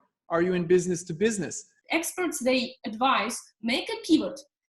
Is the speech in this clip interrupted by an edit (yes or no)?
yes